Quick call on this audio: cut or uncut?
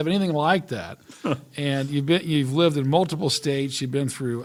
uncut